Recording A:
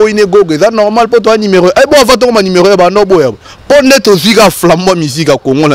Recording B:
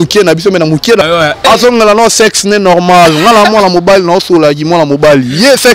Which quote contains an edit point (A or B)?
B